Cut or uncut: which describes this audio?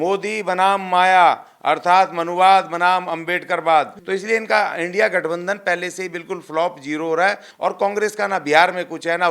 cut